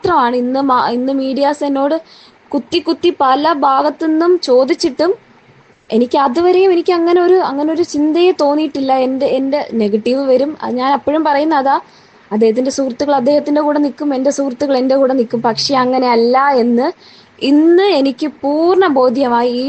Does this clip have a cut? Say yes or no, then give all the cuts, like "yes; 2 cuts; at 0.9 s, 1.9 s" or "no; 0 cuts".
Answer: no; 0 cuts